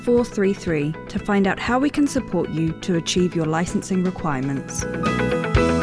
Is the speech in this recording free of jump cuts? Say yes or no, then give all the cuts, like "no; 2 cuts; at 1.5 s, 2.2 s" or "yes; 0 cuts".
no; 1 cut; at 4.8 s